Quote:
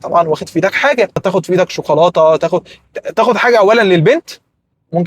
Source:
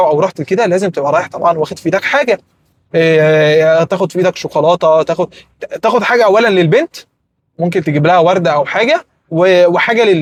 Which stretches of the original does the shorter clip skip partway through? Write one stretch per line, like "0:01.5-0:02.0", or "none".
0:02.5-0:03.9